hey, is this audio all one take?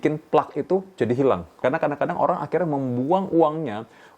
no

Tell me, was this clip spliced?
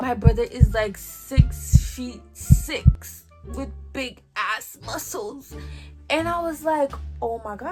no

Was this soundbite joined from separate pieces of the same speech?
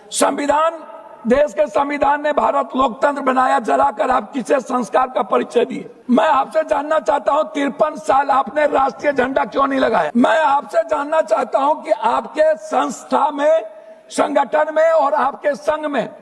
yes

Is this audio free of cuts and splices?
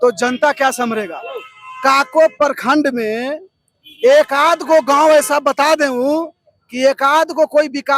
yes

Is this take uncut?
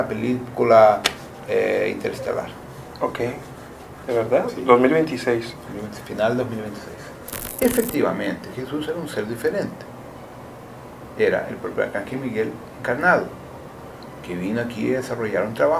no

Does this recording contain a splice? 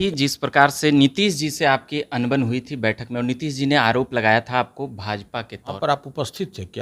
yes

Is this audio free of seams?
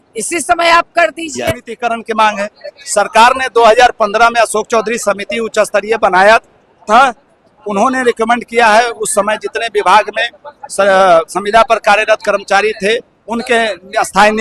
no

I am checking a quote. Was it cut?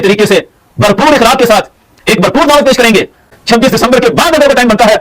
yes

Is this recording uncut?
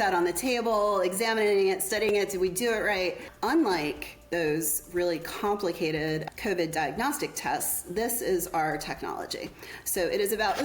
no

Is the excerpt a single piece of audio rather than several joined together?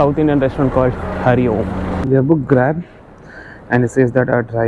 no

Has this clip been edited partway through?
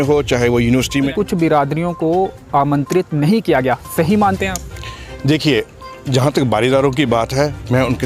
yes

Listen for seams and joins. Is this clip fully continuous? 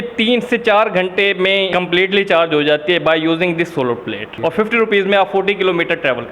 no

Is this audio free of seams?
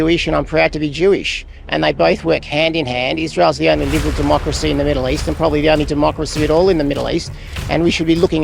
yes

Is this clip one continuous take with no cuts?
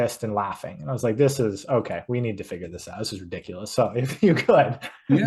yes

